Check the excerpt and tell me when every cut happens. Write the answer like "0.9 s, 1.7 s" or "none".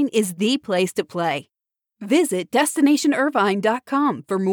none